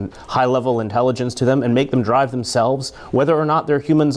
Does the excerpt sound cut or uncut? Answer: uncut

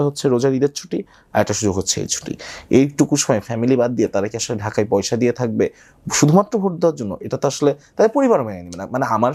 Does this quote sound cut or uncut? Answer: uncut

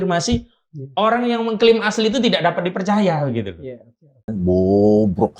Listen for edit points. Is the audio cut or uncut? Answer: cut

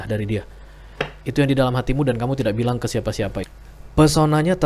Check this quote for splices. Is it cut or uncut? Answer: cut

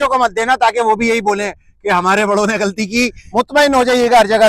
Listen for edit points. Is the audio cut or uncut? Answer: cut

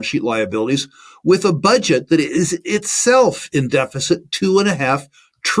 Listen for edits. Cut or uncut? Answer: uncut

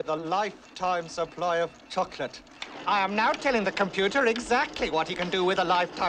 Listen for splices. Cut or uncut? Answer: uncut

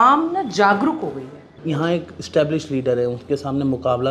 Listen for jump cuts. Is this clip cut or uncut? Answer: cut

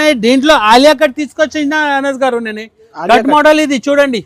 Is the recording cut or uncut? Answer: uncut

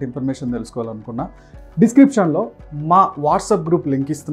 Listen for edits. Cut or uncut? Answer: uncut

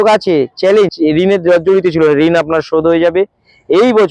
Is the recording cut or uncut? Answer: cut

